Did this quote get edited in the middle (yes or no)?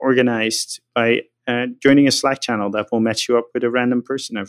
yes